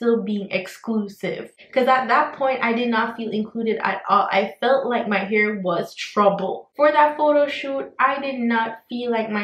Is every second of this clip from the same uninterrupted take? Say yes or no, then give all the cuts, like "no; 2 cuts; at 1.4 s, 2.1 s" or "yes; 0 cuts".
no; 1 cut; at 6.6 s